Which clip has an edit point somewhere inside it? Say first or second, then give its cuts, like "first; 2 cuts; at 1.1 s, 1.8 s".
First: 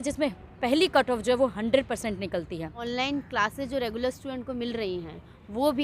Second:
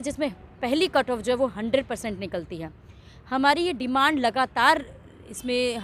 first; 1 cut; at 2.8 s